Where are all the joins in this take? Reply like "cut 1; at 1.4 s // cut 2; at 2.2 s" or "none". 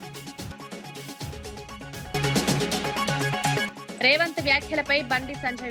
none